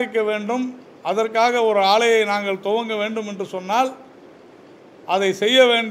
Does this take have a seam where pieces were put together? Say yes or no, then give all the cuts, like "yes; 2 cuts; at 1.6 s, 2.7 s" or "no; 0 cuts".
no; 0 cuts